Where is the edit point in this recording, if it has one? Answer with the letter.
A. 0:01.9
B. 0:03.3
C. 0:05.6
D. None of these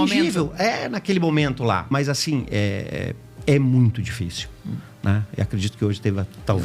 A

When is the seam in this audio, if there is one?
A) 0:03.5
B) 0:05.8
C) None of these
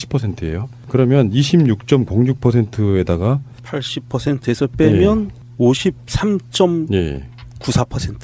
B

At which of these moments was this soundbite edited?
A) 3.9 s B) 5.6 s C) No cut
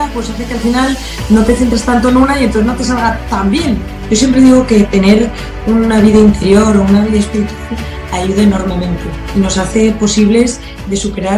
A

